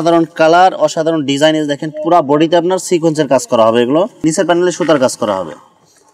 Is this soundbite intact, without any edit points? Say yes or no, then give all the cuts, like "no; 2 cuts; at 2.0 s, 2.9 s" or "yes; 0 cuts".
yes; 0 cuts